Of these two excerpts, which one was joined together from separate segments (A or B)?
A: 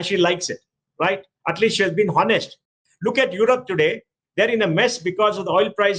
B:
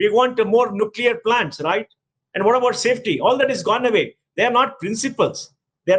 A